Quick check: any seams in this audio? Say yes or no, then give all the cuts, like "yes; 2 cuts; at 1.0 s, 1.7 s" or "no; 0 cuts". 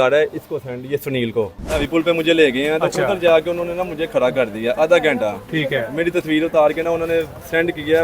yes; 1 cut; at 1.9 s